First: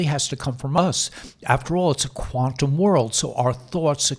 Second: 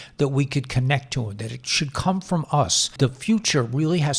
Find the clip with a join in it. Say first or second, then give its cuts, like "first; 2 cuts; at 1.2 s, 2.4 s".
second; 1 cut; at 2.9 s